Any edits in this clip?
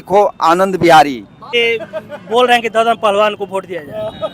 yes; 1 cut; at 1.5 s

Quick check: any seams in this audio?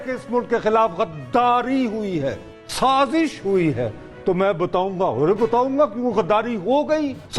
no; 0 cuts

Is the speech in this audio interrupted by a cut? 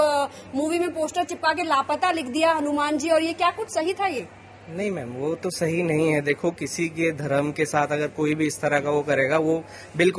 no; 0 cuts

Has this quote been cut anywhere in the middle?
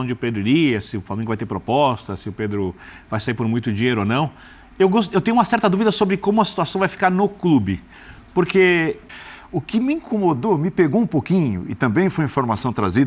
yes; 1 cut; at 9.0 s

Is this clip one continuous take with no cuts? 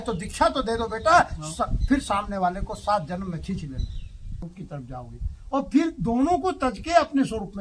no; 1 cut; at 4.4 s

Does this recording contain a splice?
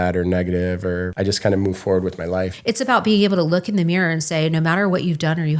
yes; 2 cuts; at 1.1 s, 2.6 s

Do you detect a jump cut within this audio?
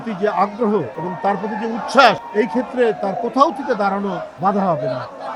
yes; 3 cuts; at 1.0 s, 2.2 s, 4.3 s

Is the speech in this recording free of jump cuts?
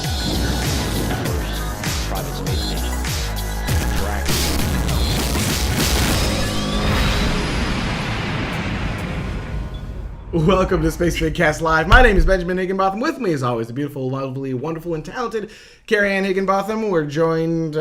no; 1 cut; at 11.6 s

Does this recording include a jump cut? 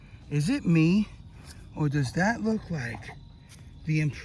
no; 0 cuts

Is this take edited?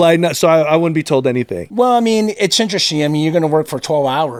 no; 0 cuts

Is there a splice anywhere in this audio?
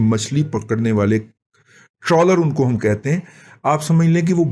no; 0 cuts

